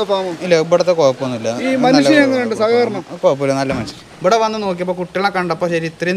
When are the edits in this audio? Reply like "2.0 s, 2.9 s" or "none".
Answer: 3.9 s